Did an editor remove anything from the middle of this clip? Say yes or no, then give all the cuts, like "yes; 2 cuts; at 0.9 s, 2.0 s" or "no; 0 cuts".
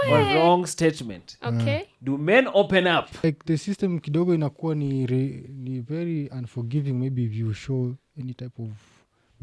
yes; 1 cut; at 3.2 s